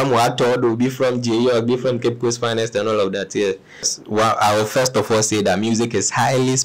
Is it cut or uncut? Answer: cut